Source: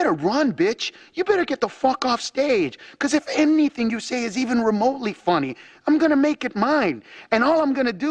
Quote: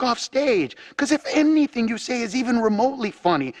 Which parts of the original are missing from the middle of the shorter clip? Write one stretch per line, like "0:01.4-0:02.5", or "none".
none